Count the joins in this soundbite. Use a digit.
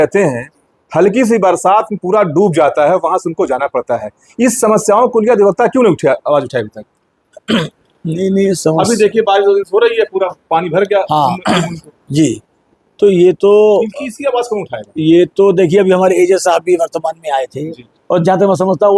0